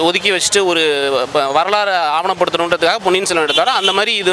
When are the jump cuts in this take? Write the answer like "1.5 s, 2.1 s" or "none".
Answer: none